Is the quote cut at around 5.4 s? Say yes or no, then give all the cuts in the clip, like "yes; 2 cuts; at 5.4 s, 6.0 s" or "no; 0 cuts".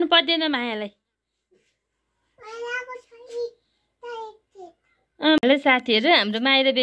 yes; 1 cut; at 5.4 s